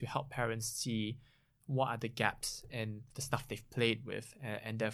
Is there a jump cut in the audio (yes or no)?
yes